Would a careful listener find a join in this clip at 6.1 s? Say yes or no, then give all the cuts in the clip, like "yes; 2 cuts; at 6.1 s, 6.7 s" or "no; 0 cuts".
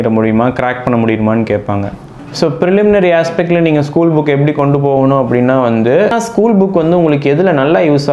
yes; 2 cuts; at 2.0 s, 6.1 s